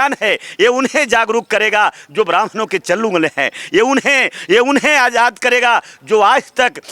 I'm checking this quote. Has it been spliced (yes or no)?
no